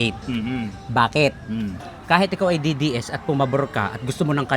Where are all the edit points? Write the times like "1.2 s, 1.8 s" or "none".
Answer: 1.9 s